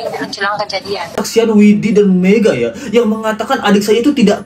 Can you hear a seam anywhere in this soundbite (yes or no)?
yes